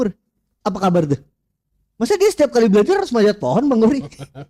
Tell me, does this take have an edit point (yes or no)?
no